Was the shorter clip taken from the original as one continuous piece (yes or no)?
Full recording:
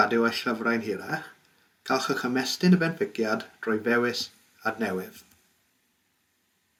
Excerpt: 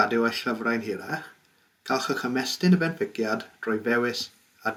yes